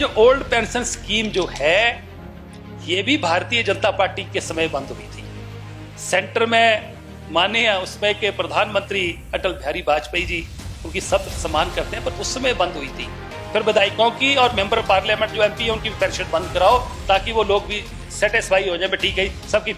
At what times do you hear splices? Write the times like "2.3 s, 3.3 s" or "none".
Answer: 13.4 s